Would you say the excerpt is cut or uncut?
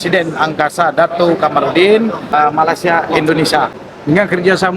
cut